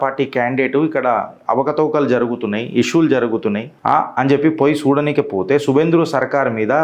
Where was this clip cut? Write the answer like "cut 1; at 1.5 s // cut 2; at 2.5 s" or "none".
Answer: none